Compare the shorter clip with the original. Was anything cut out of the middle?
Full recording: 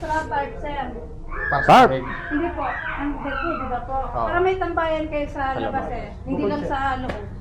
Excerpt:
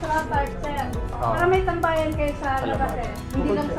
yes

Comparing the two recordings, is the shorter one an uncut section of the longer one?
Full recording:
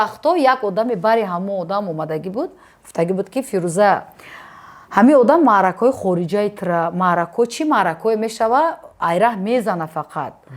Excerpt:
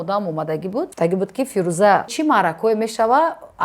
no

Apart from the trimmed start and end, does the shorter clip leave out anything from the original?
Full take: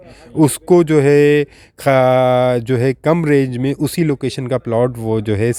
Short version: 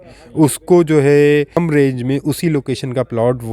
yes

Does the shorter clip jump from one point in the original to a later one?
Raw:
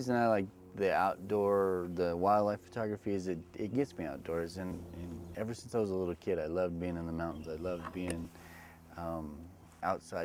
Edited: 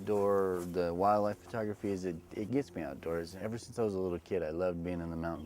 yes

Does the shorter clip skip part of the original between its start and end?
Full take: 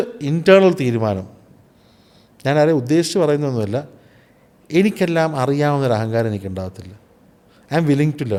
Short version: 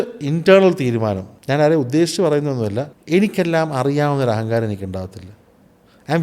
yes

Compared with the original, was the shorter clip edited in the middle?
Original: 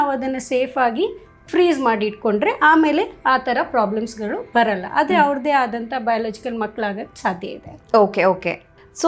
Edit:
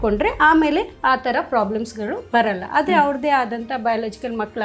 no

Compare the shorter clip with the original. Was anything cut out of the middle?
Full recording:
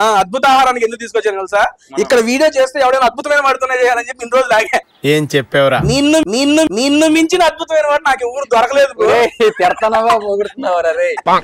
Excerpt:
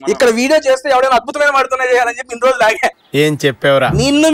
no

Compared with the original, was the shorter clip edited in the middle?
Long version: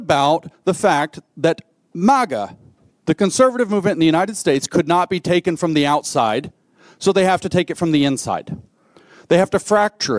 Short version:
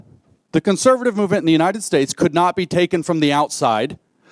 no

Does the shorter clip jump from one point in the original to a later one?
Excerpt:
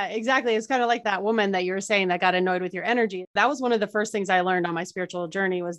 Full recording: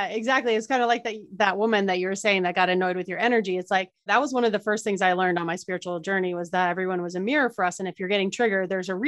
yes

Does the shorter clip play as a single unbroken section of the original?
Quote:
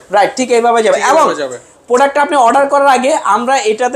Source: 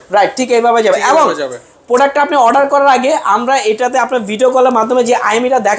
yes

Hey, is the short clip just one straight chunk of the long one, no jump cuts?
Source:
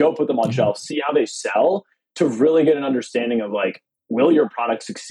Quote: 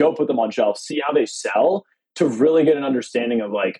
yes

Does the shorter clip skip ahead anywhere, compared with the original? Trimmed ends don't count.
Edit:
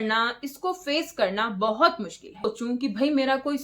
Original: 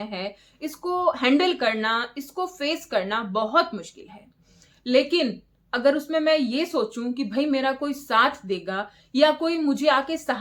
yes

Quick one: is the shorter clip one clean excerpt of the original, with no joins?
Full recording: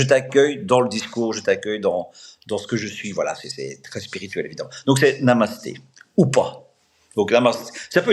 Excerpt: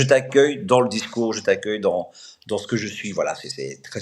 yes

